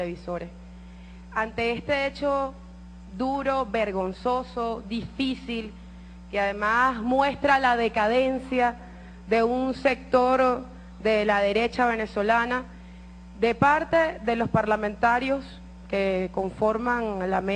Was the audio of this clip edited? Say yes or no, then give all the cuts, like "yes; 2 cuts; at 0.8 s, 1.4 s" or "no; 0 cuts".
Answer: yes; 1 cut; at 10.6 s